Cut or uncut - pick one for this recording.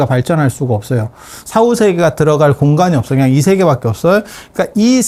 uncut